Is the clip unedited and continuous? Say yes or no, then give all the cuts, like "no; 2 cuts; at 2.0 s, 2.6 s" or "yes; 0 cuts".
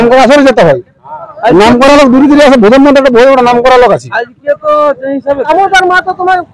no; 1 cut; at 5.4 s